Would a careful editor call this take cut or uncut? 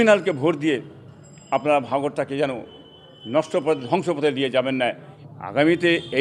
cut